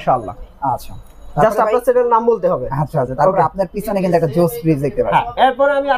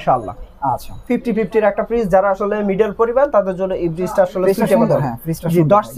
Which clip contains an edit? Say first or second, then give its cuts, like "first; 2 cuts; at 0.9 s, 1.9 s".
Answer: second; 1 cut; at 1.0 s